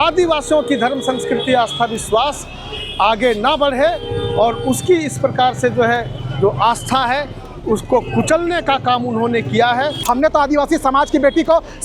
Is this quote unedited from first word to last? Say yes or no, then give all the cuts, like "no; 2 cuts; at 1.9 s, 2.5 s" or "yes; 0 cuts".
no; 1 cut; at 10.0 s